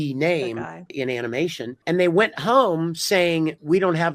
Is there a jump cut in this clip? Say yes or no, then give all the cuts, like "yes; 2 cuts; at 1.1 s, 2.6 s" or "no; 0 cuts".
yes; 2 cuts; at 0.9 s, 1.7 s